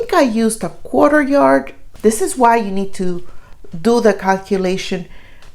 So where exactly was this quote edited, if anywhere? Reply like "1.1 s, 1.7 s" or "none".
1.8 s